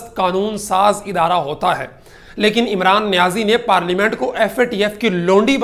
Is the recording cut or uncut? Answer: uncut